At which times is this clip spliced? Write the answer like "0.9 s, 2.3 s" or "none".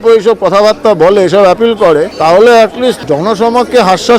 2.1 s, 3.0 s